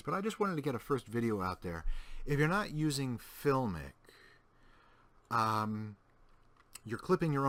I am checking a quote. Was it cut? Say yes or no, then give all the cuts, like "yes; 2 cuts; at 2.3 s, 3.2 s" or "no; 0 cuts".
no; 0 cuts